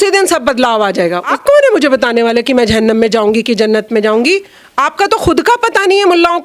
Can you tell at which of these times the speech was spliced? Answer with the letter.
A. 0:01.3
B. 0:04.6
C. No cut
A